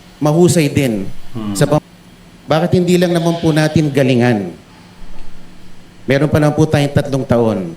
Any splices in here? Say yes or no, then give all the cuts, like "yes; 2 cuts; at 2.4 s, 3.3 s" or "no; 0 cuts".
yes; 1 cut; at 1.8 s